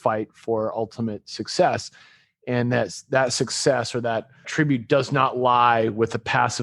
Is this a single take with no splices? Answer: no; 1 cut; at 4.5 s

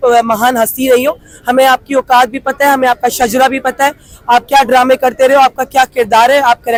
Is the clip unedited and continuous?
yes; 0 cuts

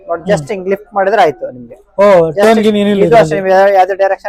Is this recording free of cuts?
yes; 0 cuts

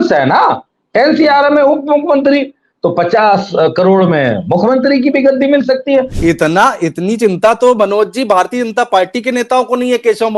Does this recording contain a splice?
yes; 1 cut; at 6.1 s

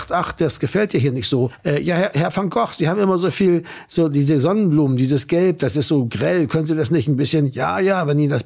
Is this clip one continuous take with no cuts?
no; 1 cut; at 1.6 s

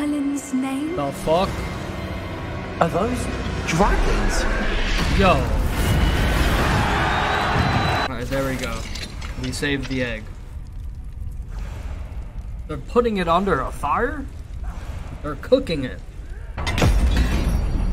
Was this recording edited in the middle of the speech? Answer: yes; 2 cuts; at 8.1 s, 16.6 s

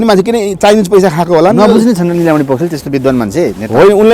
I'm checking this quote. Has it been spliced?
no; 0 cuts

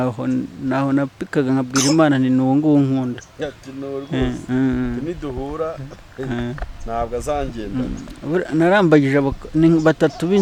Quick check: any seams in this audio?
no; 0 cuts

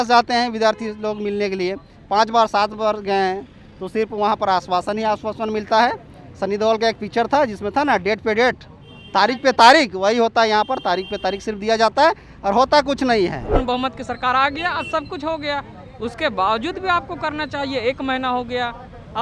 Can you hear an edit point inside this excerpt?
yes; 1 cut; at 13.5 s

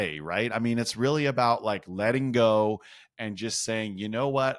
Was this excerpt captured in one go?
yes; 0 cuts

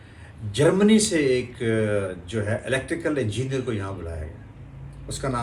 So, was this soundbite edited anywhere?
no; 0 cuts

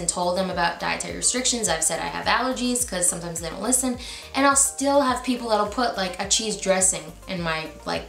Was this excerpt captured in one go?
yes; 0 cuts

